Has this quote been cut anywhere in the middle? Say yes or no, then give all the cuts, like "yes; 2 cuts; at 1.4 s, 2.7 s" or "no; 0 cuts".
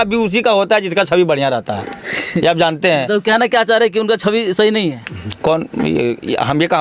no; 0 cuts